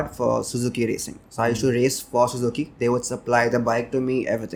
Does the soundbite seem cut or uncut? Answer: uncut